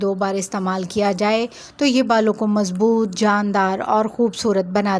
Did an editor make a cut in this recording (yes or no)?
no